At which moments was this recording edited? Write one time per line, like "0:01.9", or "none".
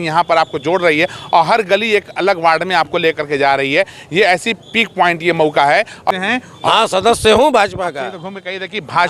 0:06.1